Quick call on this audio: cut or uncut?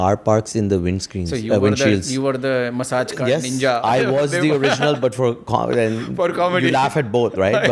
uncut